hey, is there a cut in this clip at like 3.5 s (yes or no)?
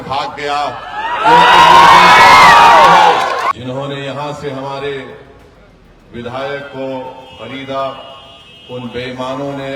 yes